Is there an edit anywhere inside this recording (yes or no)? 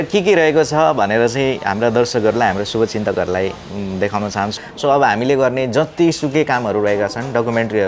yes